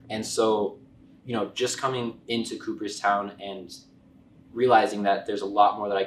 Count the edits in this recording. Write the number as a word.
zero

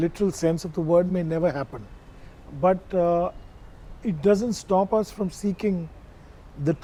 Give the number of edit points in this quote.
zero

